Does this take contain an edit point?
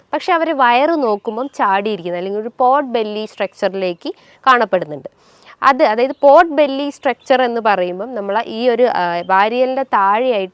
no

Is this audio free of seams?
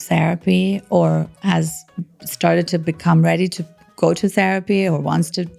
yes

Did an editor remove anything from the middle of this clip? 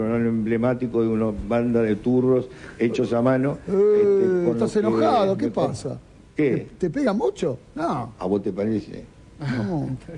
no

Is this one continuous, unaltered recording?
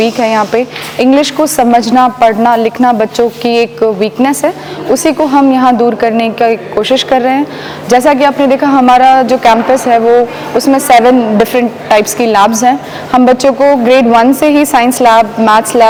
yes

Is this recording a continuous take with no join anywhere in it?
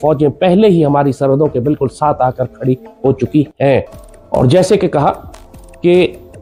yes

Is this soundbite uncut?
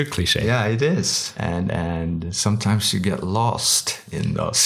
no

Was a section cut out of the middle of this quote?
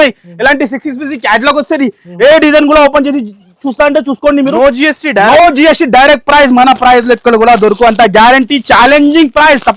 no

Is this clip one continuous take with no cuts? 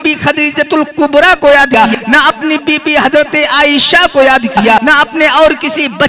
no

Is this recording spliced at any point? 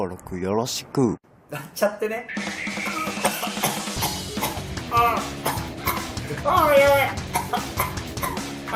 yes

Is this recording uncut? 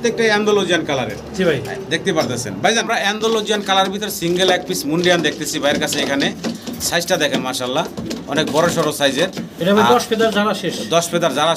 no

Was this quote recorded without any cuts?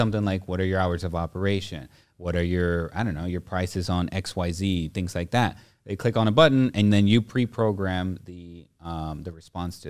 yes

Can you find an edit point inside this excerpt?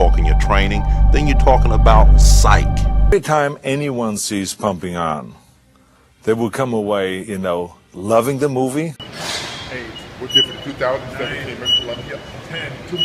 yes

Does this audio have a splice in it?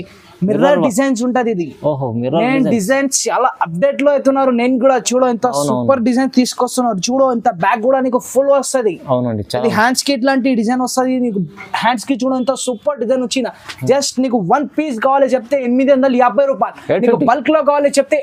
no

